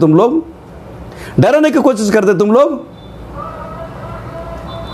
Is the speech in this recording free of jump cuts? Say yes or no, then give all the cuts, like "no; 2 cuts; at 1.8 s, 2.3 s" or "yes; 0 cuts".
yes; 0 cuts